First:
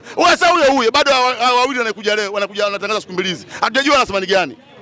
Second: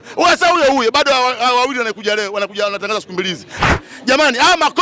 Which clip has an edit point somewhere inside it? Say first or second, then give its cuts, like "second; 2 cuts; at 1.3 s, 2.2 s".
second; 1 cut; at 3.7 s